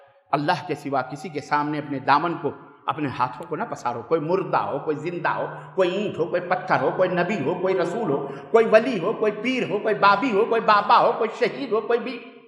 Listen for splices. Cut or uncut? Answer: uncut